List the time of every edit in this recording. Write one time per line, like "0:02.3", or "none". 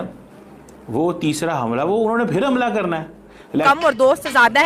0:03.6